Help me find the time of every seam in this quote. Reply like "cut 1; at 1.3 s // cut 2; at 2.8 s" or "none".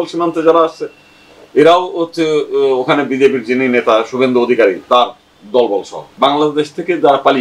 cut 1; at 6.1 s

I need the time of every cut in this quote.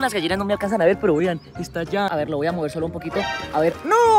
cut 1; at 2.1 s

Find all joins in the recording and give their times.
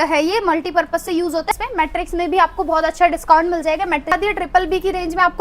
cut 1; at 1.5 s // cut 2; at 4.1 s

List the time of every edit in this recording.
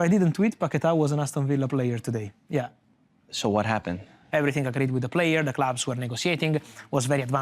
cut 1; at 4.2 s

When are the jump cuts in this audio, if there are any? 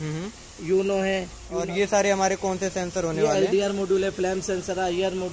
cut 1; at 1.4 s

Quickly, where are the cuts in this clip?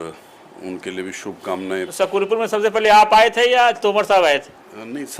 cut 1; at 1.9 s

